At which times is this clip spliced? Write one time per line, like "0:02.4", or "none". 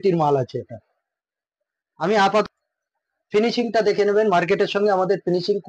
0:02.4